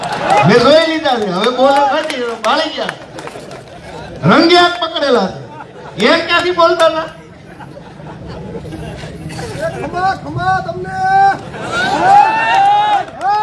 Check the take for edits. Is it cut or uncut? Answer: uncut